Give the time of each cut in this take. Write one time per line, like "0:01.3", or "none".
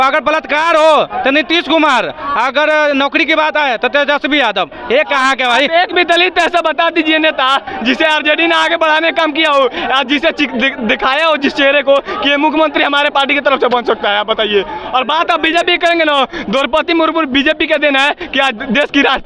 none

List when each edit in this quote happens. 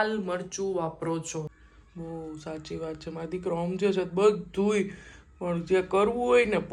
0:01.5

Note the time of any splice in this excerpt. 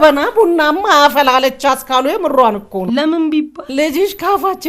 0:02.8
0:03.6

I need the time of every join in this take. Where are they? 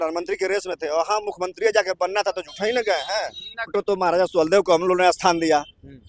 0:03.7

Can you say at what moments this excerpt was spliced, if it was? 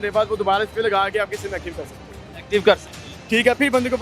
none

